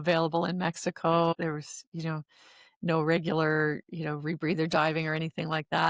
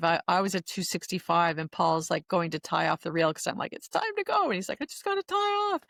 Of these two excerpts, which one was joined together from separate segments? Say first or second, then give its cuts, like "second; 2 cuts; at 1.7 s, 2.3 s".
first; 1 cut; at 1.3 s